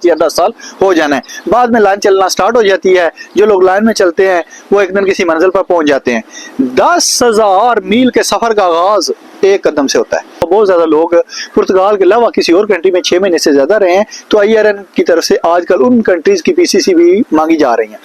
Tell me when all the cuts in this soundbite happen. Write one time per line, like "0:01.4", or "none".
0:01.2
0:10.4